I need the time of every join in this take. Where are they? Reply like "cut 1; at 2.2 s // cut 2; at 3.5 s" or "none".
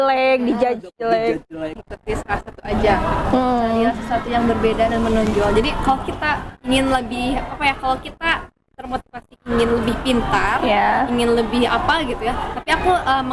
cut 1; at 1.9 s